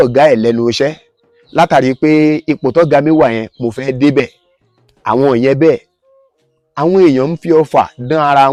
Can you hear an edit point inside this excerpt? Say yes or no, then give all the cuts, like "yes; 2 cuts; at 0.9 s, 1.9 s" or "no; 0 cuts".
no; 0 cuts